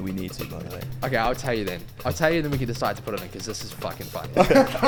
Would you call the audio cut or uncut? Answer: uncut